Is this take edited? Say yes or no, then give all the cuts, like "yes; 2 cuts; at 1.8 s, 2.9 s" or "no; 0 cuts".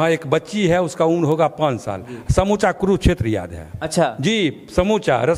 no; 0 cuts